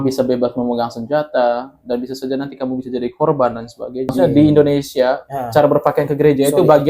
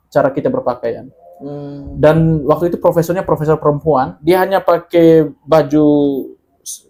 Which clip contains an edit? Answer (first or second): first